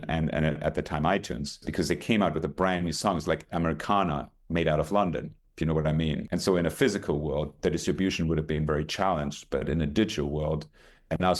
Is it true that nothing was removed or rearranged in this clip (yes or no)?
no